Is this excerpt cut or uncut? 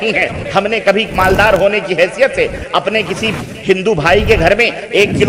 uncut